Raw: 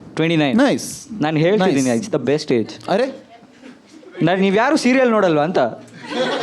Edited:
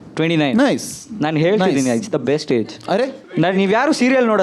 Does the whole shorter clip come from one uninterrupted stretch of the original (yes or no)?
no